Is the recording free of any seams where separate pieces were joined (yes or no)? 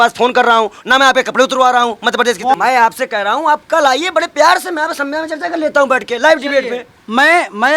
yes